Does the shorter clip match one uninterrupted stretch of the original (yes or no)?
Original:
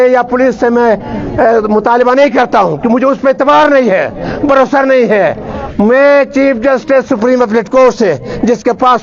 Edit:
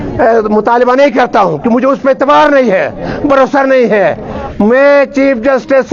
yes